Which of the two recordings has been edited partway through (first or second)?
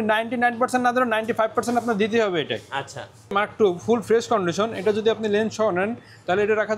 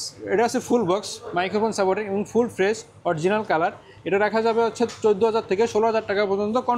first